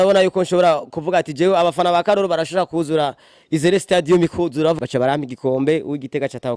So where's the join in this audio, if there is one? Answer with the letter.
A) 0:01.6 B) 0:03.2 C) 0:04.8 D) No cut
C